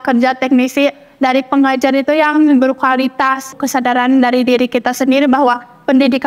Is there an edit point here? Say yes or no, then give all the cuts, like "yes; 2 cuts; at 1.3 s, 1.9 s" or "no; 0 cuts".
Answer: yes; 1 cut; at 3.5 s